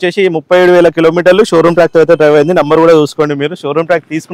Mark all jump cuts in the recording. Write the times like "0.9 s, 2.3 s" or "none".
none